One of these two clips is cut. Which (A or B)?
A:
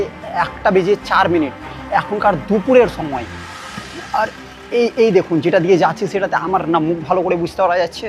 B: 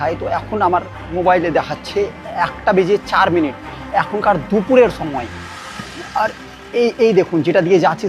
B